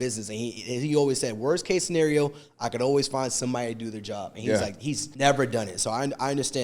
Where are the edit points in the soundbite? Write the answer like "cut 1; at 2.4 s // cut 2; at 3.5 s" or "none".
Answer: cut 1; at 5.1 s